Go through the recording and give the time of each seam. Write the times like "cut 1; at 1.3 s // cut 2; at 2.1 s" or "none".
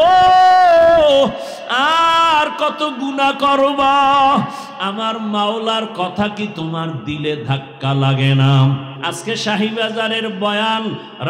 cut 1; at 9.0 s